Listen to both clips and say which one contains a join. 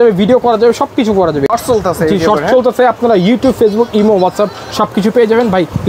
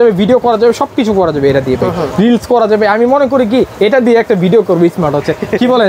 first; 1 cut; at 1.5 s

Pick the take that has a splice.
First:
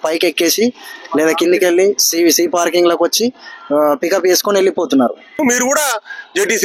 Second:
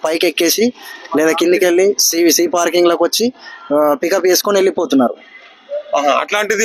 first; 1 cut; at 5.4 s

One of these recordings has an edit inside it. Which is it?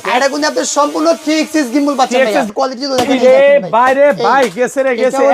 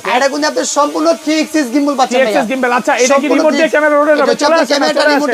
first; 1 cut; at 2.5 s

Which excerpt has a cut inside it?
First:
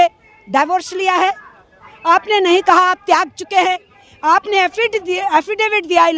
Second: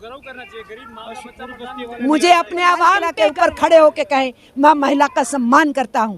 second; 1 cut; at 3.1 s

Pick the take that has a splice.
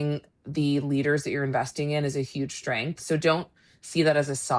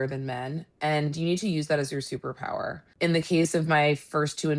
second; 1 cut; at 2.8 s

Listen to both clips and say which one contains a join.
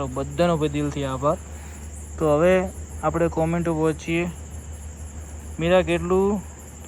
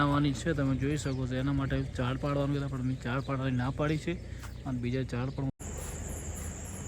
second; 1 cut; at 5.6 s

